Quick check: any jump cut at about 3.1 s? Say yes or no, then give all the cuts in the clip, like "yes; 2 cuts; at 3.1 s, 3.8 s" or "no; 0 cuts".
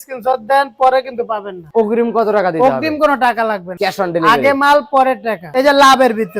no; 2 cuts; at 1.6 s, 5.4 s